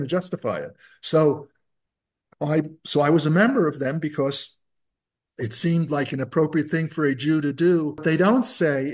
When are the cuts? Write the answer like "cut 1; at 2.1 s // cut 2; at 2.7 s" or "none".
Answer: cut 1; at 8.0 s